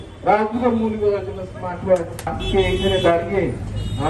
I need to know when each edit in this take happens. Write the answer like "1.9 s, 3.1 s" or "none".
2.3 s